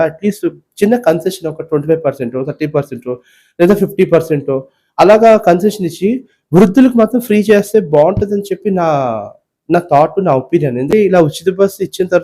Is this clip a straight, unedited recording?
no; 1 cut; at 10.9 s

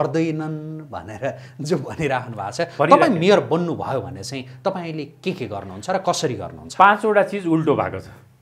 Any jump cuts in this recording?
no; 0 cuts

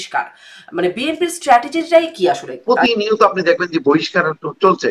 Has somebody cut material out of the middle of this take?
yes; 1 cut; at 2.5 s

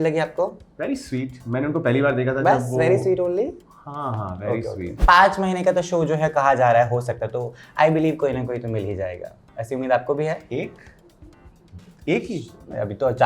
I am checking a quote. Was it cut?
yes; 1 cut; at 4.9 s

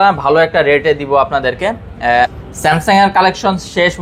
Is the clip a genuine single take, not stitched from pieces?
no; 1 cut; at 2.3 s

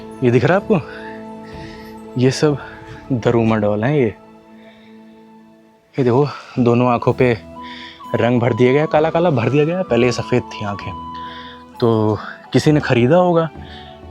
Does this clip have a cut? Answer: no; 0 cuts

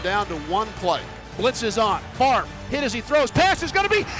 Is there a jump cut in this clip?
yes; 1 cut; at 1.3 s

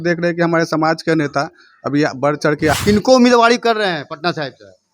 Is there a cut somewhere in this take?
yes; 1 cut; at 2.7 s

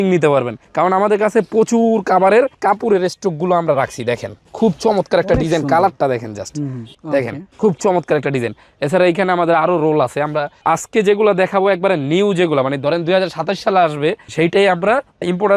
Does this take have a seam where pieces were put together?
no; 0 cuts

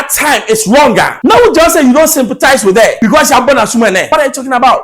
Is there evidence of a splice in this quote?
yes; 3 cuts; at 1.1 s, 2.9 s, 4.1 s

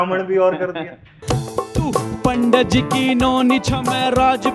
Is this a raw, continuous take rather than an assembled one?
no; 1 cut; at 1.1 s

